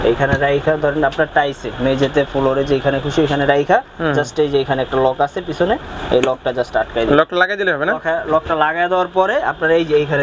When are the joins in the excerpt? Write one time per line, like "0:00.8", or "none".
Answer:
none